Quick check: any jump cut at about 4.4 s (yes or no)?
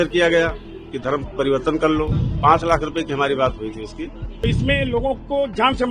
yes